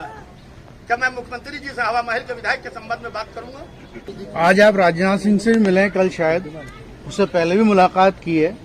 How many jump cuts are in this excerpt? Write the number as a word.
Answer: one